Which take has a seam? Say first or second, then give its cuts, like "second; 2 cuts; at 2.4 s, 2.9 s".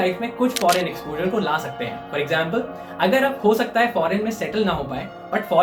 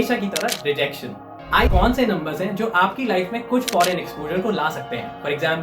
second; 1 cut; at 1.7 s